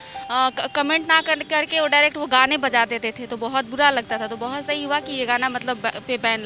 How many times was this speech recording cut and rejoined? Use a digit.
0